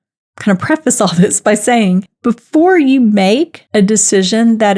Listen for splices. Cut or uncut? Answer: cut